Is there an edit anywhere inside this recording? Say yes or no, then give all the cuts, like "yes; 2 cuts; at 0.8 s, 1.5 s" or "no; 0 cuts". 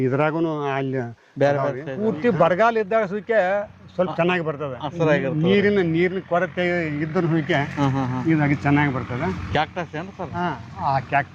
yes; 1 cut; at 1.9 s